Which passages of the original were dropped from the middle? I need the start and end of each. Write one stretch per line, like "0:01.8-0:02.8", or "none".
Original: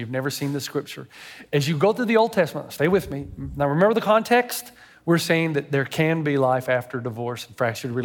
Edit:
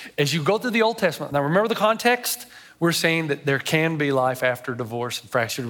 0:02.6-0:03.5

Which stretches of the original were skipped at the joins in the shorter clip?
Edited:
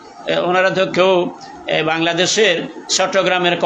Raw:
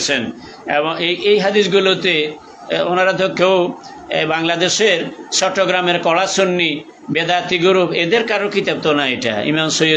none

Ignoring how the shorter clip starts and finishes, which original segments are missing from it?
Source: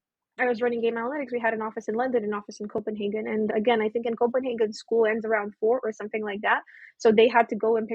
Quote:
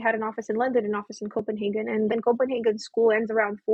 0:03.5-0:04.1

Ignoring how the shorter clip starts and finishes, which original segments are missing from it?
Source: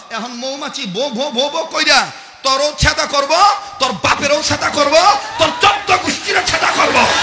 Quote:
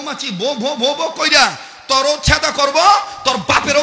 none

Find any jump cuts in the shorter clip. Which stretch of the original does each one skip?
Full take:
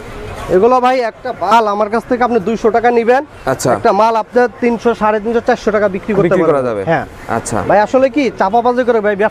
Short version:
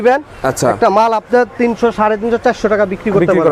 none

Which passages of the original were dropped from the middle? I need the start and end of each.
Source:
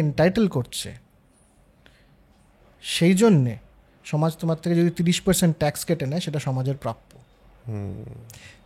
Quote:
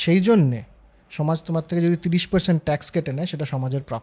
none

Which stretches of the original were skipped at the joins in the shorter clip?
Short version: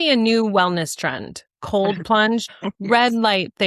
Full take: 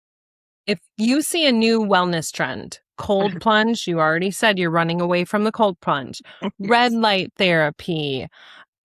0:03.8-0:06.3

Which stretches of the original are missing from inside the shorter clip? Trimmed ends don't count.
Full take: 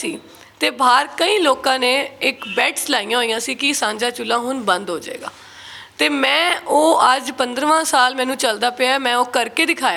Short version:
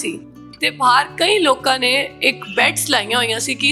none

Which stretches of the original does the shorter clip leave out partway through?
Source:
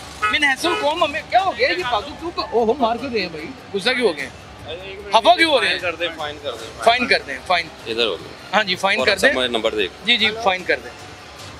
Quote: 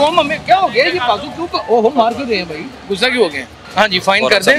0:04.4-0:08.3

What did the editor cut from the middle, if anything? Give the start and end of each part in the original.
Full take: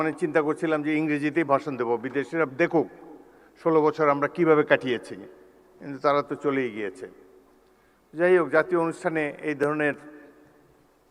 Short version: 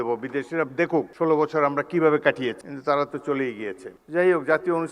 0:02.9-0:03.6
0:05.1-0:05.9
0:07.1-0:08.0

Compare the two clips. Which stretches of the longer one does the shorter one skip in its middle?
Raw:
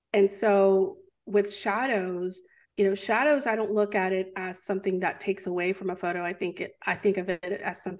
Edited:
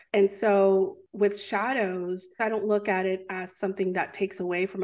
0:01.0-0:01.2
0:02.5-0:03.4

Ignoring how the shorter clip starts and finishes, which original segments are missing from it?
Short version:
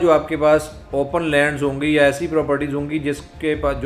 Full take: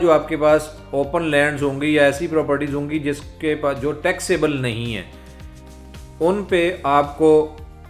none

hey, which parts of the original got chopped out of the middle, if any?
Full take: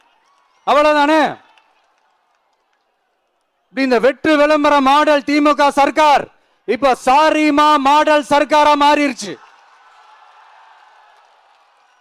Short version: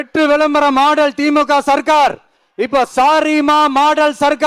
none

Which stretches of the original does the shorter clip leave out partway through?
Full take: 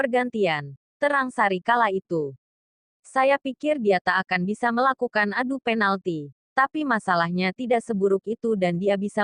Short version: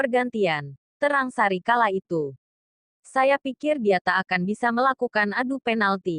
none

